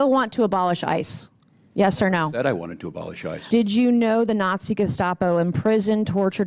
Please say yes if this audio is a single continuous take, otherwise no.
no